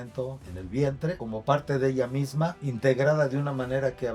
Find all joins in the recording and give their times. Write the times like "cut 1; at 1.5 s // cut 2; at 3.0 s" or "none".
cut 1; at 1.2 s // cut 2; at 2.6 s